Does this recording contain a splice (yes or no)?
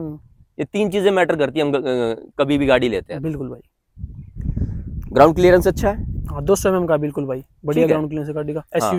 no